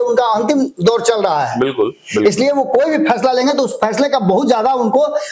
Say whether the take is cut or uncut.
uncut